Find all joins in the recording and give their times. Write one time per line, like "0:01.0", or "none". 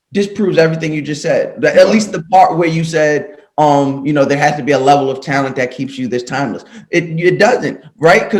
none